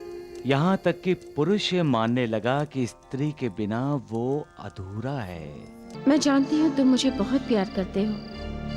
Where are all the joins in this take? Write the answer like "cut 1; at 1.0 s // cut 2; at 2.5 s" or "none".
cut 1; at 5.9 s